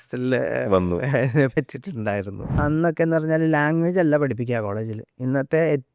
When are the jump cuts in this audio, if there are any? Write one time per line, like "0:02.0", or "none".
0:02.6